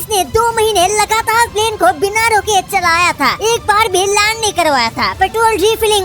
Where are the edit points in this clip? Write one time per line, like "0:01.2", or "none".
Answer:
none

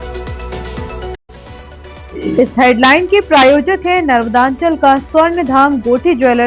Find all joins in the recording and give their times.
0:01.1

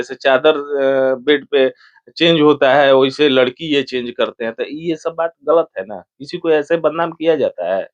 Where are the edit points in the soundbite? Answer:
none

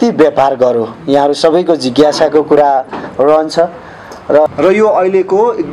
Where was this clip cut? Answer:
0:04.5

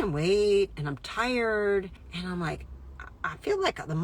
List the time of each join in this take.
0:02.0

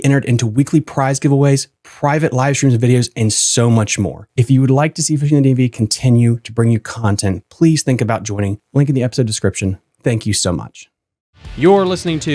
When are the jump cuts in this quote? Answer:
0:11.4

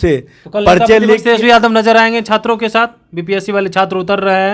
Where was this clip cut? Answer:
none

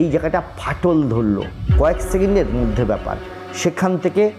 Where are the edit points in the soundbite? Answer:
0:01.6

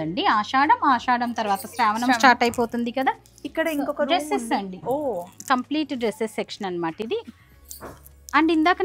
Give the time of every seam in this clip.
none

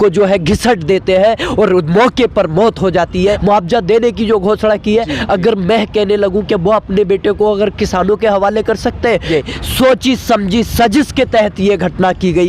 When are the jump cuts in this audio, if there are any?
0:03.4
0:09.3

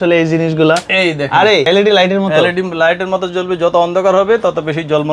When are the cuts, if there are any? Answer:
0:01.7

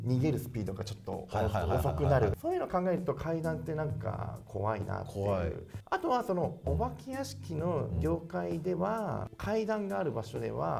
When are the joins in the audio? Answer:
0:02.4

